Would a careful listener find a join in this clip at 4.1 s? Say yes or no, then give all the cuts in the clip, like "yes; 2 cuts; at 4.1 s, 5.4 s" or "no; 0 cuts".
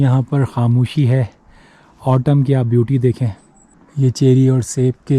yes; 1 cut; at 4.1 s